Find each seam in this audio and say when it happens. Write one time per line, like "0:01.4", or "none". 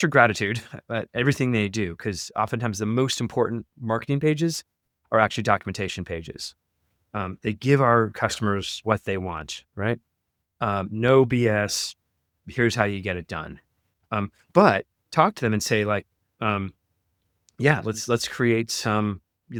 none